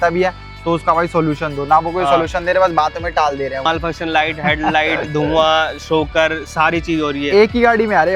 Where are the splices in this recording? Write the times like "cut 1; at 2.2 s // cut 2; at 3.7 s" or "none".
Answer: cut 1; at 3.7 s